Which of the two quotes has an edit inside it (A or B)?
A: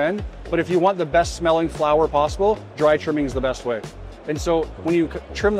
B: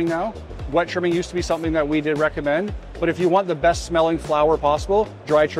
A